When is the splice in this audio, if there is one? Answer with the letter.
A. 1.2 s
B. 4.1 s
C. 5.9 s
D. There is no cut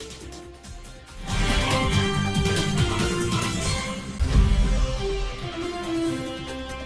B